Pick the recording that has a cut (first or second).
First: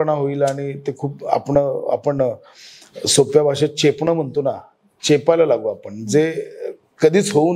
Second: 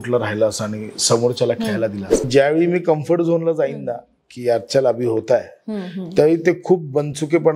second